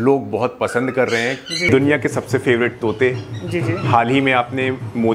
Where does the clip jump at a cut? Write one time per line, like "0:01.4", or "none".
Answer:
0:01.7